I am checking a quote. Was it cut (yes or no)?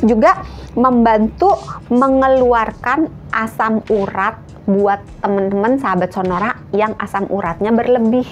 no